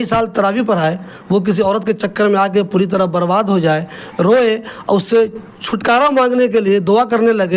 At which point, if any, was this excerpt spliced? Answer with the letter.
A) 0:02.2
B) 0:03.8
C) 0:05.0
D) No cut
D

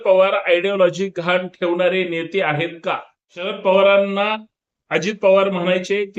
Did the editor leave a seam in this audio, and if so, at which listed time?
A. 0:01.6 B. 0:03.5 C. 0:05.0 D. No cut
B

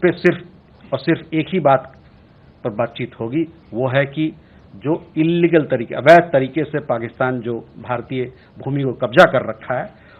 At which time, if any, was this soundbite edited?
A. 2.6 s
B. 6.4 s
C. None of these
C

